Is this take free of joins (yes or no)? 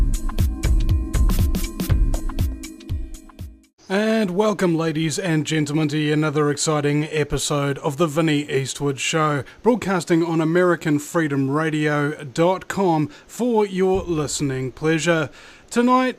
no